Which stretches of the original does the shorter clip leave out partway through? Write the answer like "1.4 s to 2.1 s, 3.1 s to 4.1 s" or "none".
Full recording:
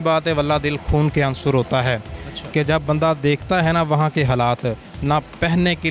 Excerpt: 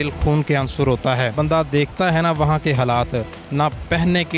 2.0 s to 2.8 s